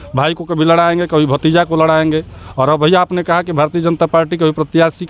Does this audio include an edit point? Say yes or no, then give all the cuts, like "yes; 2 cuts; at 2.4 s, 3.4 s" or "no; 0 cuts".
no; 0 cuts